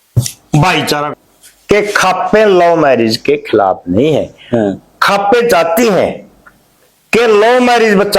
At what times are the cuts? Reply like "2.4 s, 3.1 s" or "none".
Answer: 1.1 s